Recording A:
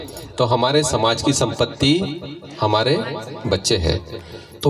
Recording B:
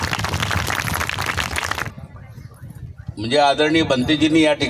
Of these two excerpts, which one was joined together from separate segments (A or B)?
B